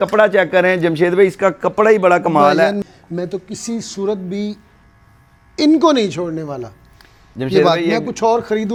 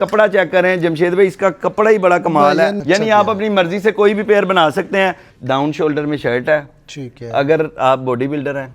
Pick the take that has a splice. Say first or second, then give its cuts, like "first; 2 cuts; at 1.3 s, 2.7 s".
second; 2 cuts; at 2.8 s, 5.3 s